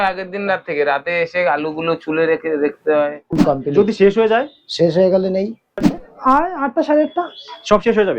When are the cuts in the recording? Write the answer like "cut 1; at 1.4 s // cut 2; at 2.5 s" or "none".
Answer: cut 1; at 3.4 s // cut 2; at 5.8 s